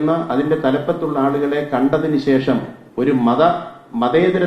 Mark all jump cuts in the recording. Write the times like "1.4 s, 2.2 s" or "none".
2.8 s